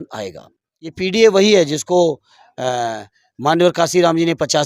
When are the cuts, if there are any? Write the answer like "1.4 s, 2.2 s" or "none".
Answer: 0.9 s